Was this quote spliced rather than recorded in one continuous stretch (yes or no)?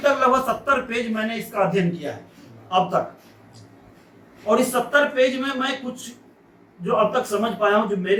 no